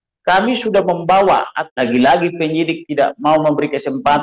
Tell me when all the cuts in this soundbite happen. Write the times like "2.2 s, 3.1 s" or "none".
1.6 s